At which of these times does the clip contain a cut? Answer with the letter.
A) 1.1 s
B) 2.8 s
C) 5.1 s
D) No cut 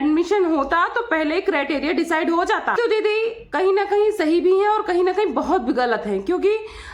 B